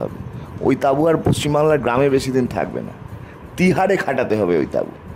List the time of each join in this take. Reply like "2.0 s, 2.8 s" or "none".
none